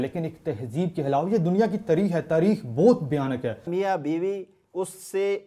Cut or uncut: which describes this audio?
cut